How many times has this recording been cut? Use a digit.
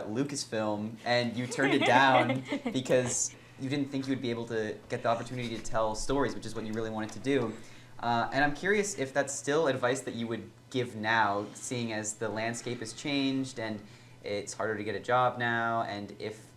1